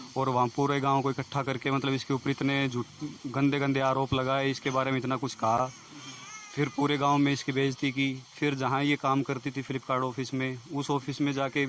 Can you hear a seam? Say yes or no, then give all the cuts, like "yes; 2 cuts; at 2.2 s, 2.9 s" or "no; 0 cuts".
no; 0 cuts